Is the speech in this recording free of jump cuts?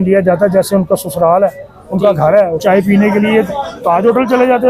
no; 1 cut; at 2.6 s

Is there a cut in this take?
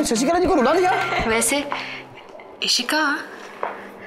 yes; 1 cut; at 1.1 s

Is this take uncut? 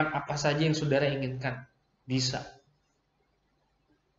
yes; 0 cuts

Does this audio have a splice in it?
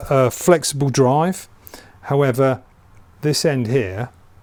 no; 0 cuts

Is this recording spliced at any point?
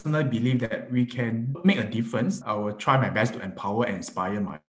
yes; 1 cut; at 2.4 s

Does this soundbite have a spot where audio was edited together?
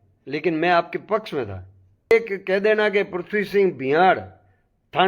yes; 1 cut; at 2.1 s

